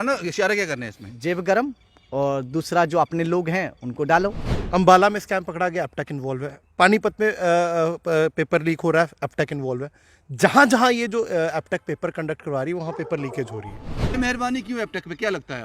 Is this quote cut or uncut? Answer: cut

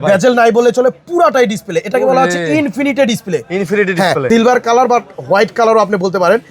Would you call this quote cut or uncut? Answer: cut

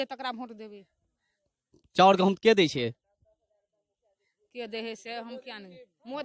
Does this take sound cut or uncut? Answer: uncut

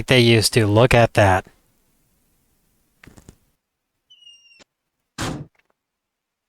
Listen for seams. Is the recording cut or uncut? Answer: uncut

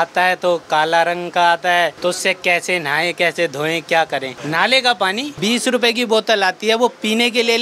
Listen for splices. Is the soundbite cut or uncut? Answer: cut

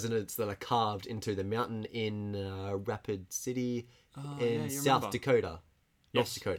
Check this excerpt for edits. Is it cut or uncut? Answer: uncut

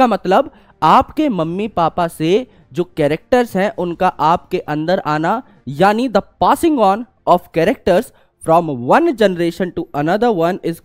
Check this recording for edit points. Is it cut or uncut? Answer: uncut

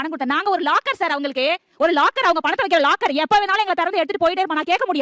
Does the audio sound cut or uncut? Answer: uncut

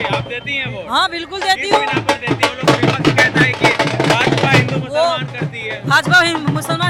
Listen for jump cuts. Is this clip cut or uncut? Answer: uncut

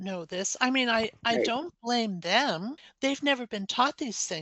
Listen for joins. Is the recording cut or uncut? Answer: cut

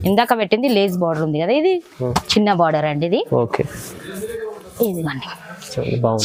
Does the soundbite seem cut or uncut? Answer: uncut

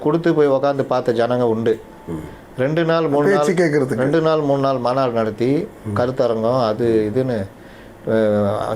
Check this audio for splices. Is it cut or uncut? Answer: uncut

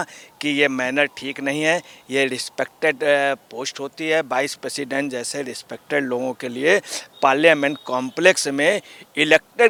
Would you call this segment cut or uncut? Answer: uncut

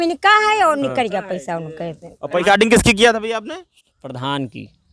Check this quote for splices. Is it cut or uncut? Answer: cut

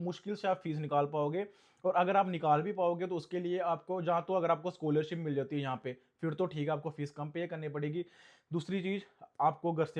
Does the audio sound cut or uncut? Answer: uncut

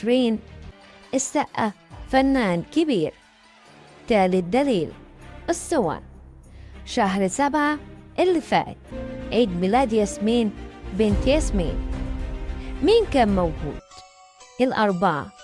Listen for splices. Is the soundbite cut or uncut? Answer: uncut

